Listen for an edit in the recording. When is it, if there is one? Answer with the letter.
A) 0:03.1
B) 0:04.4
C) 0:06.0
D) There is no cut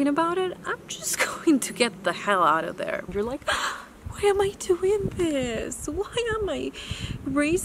A